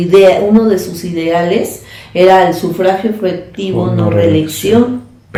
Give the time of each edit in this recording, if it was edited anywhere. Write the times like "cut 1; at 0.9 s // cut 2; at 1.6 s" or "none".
none